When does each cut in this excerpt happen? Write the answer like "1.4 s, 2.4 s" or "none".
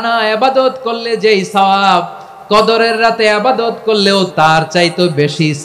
4.3 s